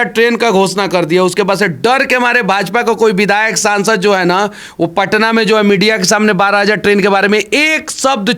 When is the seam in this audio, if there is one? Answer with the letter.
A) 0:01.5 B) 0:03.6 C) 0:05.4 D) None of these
D